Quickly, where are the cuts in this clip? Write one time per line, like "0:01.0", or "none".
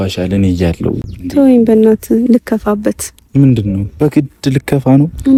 none